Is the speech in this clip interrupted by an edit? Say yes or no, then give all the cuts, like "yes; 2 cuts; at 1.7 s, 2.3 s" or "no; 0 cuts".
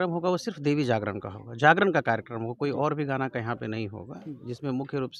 no; 0 cuts